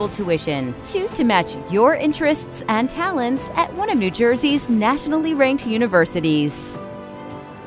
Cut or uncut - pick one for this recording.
cut